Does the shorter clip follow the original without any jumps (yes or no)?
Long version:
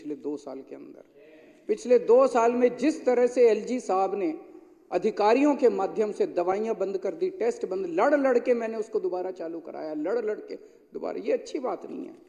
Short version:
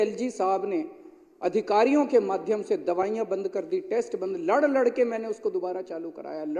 yes